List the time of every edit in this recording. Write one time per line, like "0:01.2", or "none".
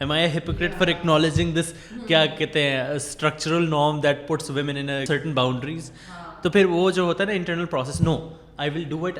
0:05.0